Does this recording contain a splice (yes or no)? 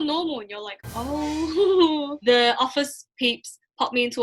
yes